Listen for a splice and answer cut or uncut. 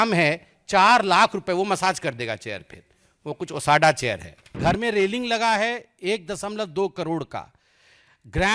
cut